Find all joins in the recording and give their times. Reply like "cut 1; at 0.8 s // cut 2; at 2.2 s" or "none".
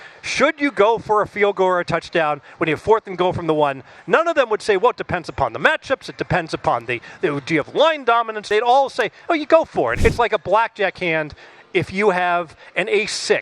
cut 1; at 8.5 s // cut 2; at 10.0 s